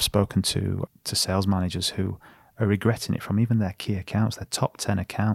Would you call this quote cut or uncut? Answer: cut